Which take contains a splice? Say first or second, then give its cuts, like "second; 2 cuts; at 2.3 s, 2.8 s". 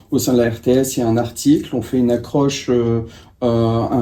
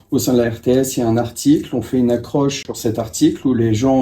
second; 1 cut; at 2.6 s